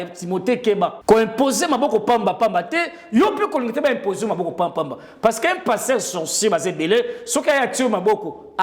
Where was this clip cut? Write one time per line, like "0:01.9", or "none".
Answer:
0:01.0